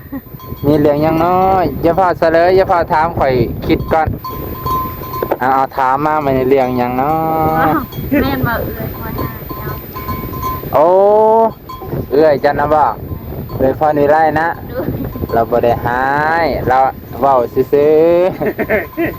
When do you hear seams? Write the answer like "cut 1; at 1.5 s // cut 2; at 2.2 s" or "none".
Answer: none